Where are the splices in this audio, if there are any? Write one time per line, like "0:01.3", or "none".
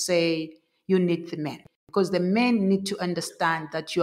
0:01.7